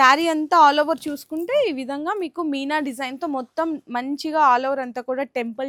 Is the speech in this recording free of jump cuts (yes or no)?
yes